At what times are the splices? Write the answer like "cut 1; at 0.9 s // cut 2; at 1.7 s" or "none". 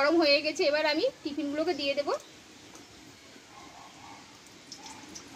none